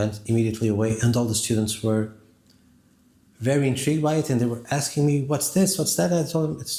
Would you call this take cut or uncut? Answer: uncut